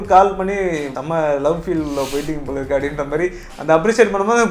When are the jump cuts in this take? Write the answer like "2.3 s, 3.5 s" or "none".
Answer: 1.0 s